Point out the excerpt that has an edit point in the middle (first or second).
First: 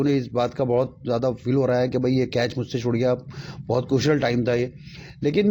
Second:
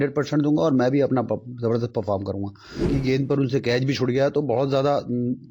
second